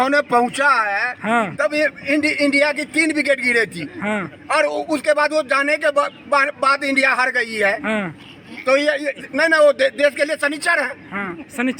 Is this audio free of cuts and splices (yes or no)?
yes